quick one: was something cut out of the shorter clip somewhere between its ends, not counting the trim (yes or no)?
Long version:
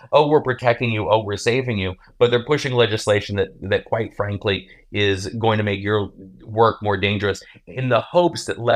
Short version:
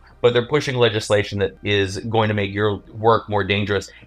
yes